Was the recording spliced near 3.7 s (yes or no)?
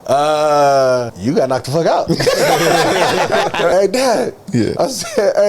yes